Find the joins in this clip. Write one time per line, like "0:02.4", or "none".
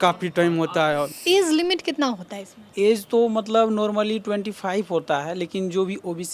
0:01.1

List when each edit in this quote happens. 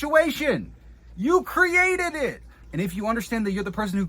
0:02.6

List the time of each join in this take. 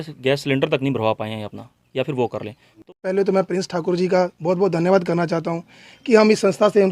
0:02.8

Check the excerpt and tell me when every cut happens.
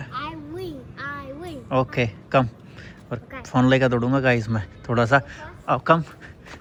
none

